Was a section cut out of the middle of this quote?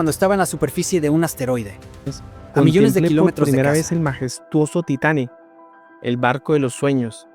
yes; 1 cut; at 3.2 s

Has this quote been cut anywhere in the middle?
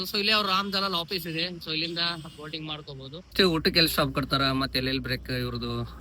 yes; 1 cut; at 3.3 s

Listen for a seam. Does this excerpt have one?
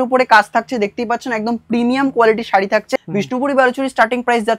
yes; 1 cut; at 2.9 s

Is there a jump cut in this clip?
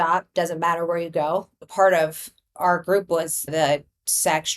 yes; 2 cuts; at 1.6 s, 3.5 s

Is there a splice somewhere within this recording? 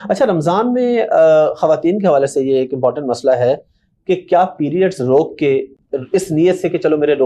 no; 0 cuts

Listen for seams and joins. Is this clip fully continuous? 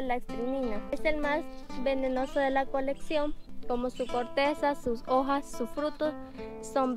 no; 2 cuts; at 0.9 s, 3.4 s

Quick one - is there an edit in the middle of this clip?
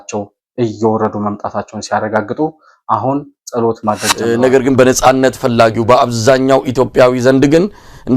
yes; 1 cut; at 4.1 s

